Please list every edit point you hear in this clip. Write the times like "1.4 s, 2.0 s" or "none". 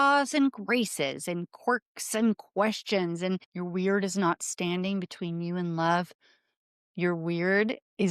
3.5 s